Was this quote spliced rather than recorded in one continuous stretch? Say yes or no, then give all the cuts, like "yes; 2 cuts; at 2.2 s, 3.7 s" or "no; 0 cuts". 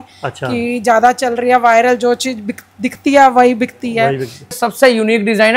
yes; 1 cut; at 4.6 s